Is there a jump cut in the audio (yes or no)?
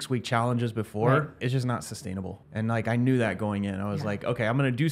yes